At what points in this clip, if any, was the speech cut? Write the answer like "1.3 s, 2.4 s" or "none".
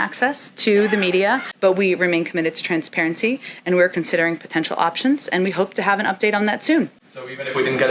1.5 s